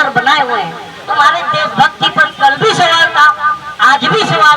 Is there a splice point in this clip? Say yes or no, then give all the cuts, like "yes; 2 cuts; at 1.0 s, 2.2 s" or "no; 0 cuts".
yes; 1 cut; at 1.0 s